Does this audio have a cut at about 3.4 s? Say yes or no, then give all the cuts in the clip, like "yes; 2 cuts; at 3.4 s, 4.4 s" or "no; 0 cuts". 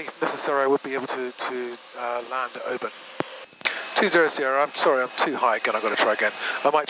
yes; 1 cut; at 3.4 s